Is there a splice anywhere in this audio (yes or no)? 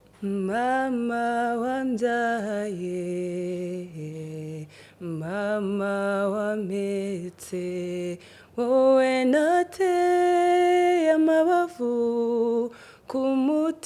no